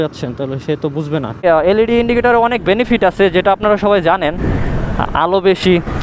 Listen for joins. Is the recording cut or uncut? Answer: cut